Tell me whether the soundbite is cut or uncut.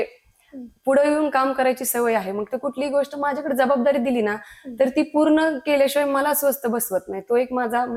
uncut